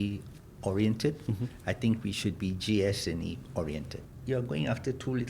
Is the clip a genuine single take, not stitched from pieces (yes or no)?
no